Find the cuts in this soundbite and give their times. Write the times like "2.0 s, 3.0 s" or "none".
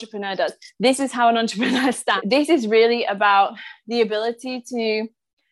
2.2 s